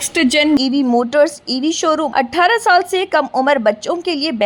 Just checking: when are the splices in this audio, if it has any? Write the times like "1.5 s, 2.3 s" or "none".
2.1 s